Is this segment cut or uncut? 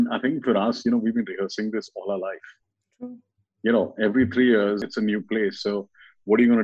cut